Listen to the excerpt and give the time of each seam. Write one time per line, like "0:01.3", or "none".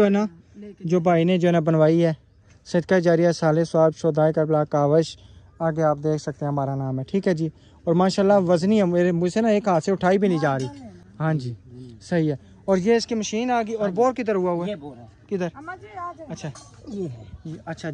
none